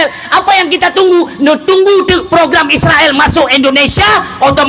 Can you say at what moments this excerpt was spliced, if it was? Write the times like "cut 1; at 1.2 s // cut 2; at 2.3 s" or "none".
none

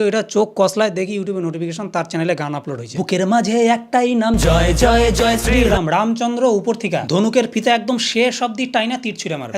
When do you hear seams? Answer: none

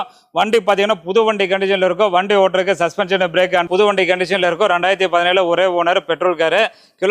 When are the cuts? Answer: cut 1; at 3.6 s

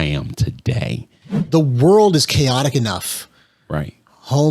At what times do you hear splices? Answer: cut 1; at 1.3 s

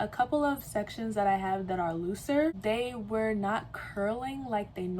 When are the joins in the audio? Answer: cut 1; at 2.6 s

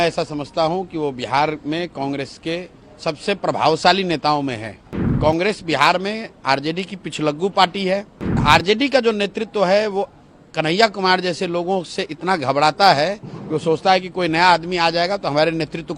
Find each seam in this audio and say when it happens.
cut 1; at 5.1 s // cut 2; at 8.4 s

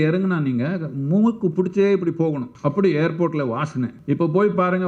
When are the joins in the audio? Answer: cut 1; at 2.5 s // cut 2; at 4.0 s

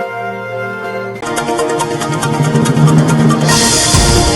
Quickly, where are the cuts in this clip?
cut 1; at 1.2 s

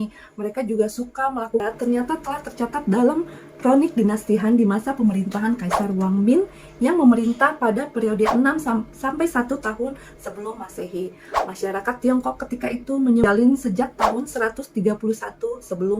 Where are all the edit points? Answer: cut 1; at 1.6 s // cut 2; at 13.2 s

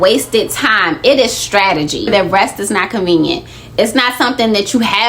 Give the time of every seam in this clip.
cut 1; at 2.1 s

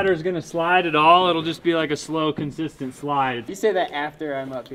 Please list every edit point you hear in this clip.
cut 1; at 3.5 s

